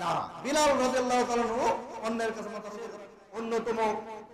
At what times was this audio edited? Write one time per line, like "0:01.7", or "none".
0:03.0